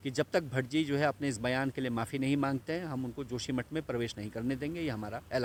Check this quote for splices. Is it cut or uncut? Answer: uncut